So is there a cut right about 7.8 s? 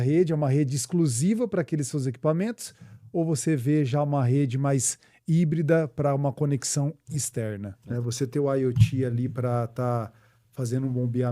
yes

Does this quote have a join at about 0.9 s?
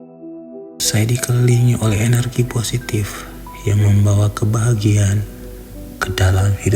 yes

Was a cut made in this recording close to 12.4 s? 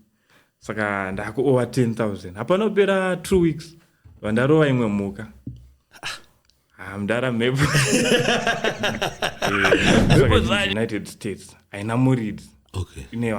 no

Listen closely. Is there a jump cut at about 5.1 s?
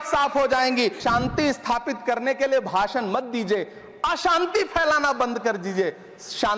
no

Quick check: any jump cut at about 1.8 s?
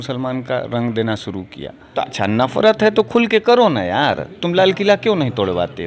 yes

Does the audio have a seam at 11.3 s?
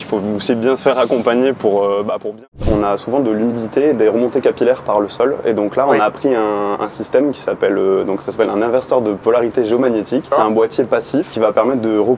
yes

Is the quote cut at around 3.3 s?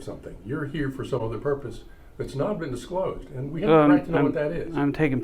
no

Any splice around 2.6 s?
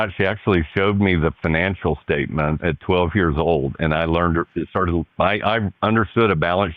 yes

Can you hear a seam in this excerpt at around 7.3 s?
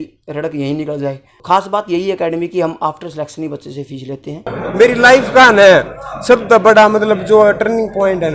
no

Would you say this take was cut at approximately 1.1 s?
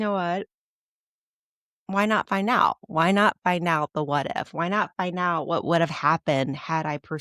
no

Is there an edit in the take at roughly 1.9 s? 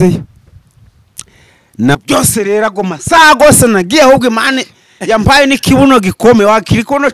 yes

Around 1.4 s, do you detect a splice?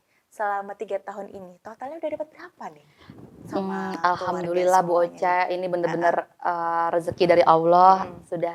no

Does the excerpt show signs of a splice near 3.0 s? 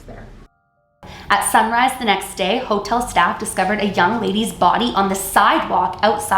no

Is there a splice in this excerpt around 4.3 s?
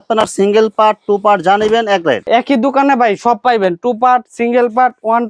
no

